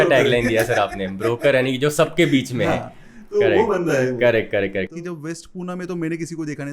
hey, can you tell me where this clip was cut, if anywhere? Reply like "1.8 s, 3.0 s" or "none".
5.0 s